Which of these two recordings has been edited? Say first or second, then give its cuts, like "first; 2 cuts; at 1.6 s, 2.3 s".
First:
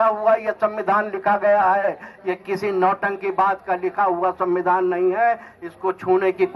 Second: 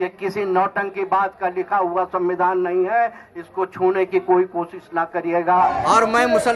second; 1 cut; at 5.5 s